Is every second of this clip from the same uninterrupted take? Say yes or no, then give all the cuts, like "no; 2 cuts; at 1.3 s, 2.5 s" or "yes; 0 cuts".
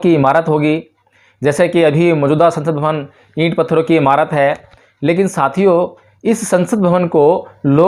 yes; 0 cuts